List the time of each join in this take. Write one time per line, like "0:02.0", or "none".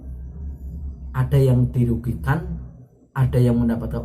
none